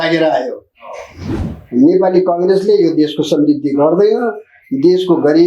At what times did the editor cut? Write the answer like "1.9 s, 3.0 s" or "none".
1.3 s